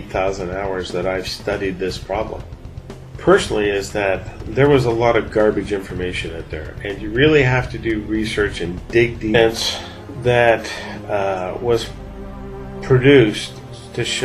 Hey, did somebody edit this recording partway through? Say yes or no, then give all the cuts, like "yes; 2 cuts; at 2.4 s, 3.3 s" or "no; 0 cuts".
no; 0 cuts